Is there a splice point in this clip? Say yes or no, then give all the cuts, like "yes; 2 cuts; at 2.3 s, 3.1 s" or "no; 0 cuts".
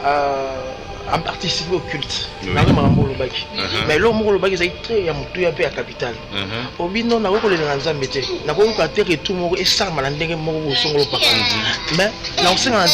no; 0 cuts